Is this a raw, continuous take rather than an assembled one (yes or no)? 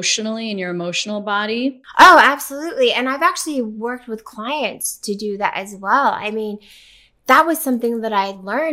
yes